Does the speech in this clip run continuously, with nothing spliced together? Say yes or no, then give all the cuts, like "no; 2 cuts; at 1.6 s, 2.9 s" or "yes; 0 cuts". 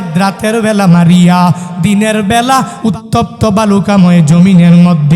no; 1 cut; at 2.7 s